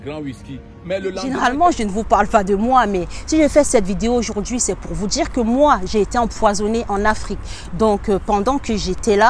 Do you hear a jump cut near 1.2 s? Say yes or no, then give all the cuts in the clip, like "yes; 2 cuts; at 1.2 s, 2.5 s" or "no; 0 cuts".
yes; 1 cut; at 1.2 s